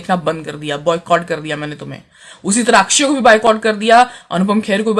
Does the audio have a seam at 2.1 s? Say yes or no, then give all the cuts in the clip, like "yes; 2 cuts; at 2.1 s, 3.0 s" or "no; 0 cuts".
no; 0 cuts